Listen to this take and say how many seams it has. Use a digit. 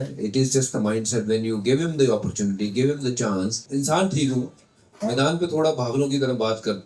1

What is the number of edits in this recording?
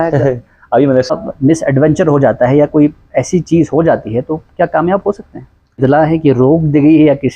2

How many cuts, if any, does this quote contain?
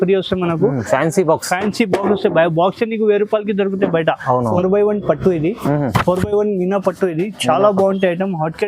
1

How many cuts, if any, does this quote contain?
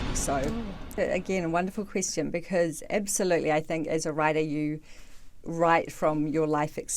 1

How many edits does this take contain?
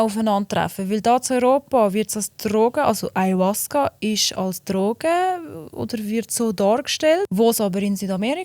1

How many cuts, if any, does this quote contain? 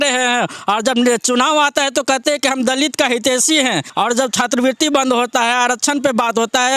1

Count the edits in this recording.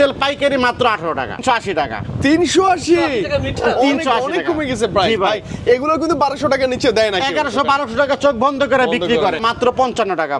2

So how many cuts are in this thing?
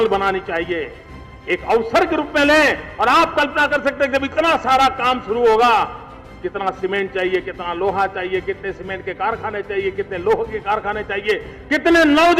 0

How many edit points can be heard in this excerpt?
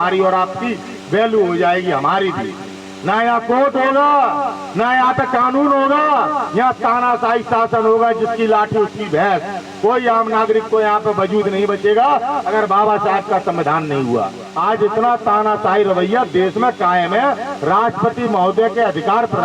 1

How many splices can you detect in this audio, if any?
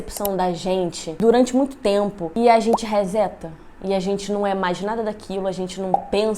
1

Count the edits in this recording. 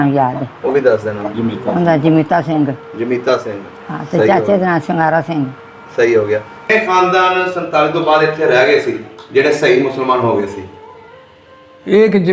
1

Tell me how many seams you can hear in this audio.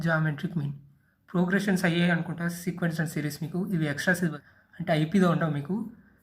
1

